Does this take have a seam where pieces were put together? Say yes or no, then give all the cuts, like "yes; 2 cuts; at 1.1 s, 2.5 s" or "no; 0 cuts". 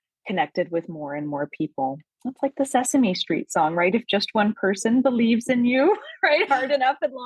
no; 0 cuts